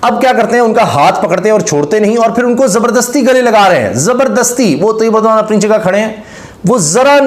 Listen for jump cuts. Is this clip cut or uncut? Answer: uncut